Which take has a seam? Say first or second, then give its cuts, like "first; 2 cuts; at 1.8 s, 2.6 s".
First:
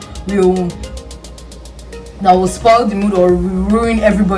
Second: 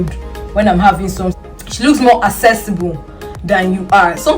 second; 1 cut; at 1.4 s